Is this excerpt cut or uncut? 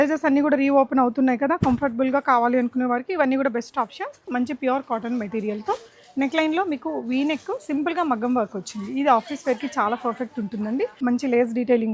cut